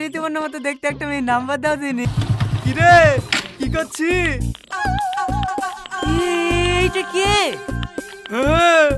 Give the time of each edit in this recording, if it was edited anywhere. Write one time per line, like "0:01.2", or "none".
0:02.0